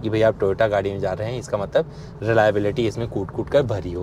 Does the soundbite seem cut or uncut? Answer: uncut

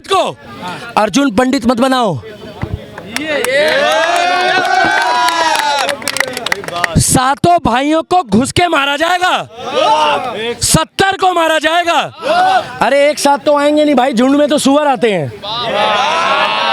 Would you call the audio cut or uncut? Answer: uncut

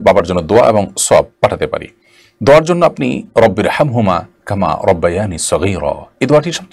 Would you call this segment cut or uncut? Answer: uncut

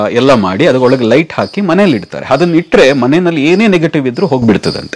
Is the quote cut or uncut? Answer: uncut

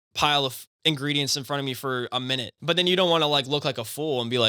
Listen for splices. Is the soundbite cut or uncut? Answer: cut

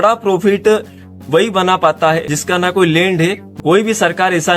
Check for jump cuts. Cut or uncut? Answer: cut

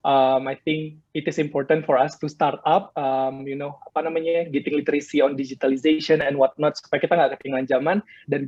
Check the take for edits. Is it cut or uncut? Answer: uncut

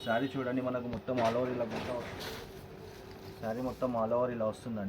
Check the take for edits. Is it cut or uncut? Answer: cut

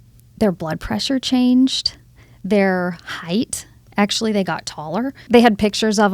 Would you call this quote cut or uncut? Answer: cut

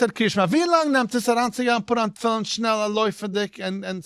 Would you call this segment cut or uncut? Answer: uncut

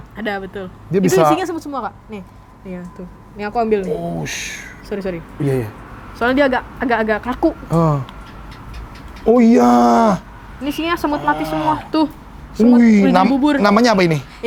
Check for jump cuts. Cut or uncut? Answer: uncut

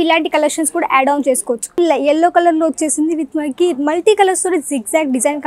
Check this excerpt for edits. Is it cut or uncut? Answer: cut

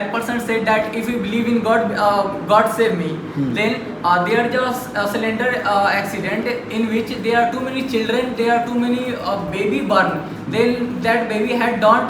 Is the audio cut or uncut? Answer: uncut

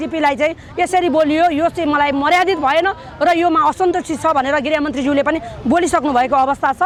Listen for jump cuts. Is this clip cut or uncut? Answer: uncut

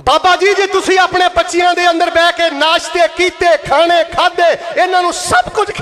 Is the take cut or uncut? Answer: uncut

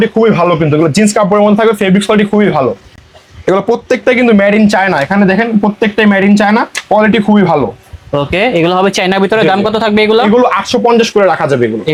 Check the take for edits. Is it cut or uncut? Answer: uncut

